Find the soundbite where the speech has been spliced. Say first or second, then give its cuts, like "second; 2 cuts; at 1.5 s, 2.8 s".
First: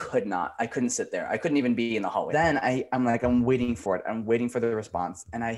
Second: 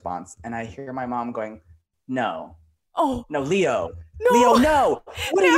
first; 1 cut; at 2.3 s